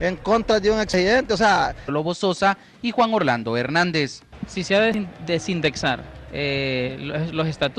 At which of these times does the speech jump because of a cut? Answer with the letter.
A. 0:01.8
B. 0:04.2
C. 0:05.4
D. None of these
D